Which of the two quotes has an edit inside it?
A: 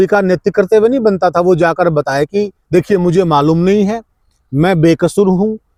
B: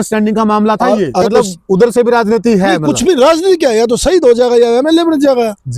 B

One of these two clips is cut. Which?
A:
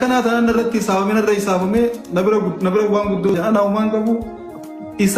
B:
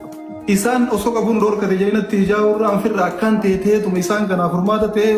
A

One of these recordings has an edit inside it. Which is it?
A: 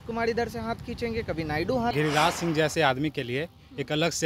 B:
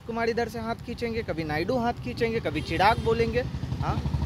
A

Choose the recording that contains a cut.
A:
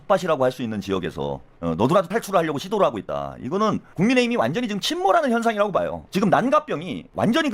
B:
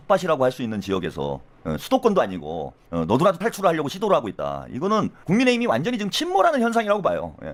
A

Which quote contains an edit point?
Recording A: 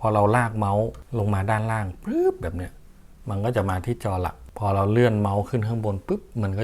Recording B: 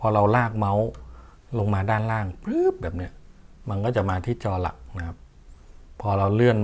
A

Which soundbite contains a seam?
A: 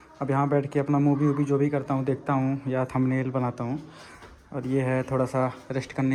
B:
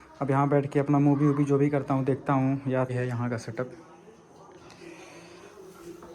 B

